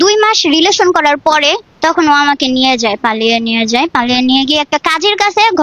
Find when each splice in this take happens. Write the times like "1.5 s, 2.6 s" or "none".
1.7 s